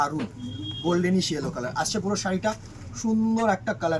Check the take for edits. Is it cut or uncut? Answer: uncut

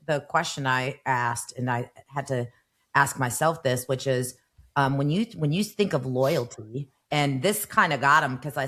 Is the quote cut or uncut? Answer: uncut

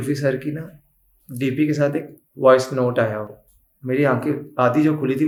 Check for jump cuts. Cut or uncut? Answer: uncut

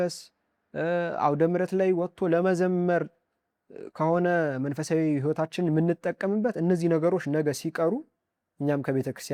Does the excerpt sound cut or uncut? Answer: uncut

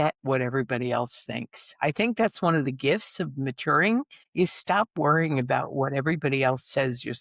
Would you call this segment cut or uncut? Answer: cut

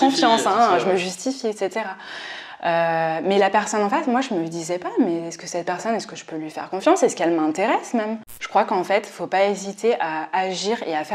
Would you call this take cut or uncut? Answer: cut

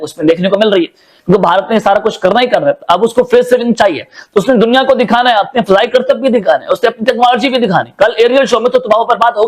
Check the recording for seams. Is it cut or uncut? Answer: uncut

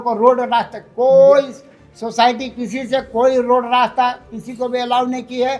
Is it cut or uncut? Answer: uncut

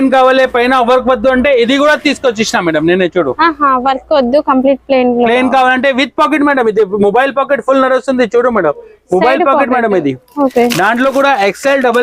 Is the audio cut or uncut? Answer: uncut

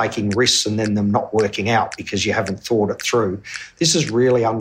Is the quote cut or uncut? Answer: uncut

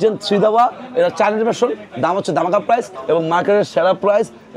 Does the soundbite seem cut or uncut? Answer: cut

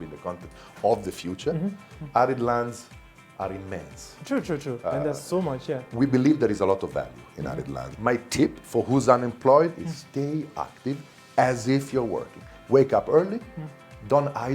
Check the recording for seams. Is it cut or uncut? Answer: cut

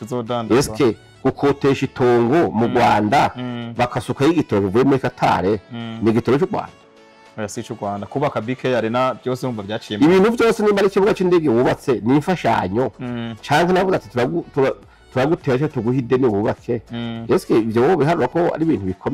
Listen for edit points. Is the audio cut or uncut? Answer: uncut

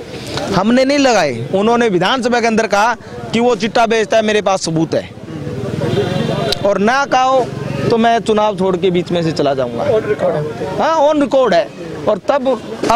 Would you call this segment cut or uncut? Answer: uncut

